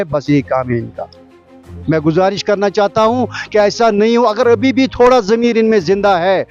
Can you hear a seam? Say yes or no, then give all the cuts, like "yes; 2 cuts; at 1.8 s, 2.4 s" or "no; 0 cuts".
no; 0 cuts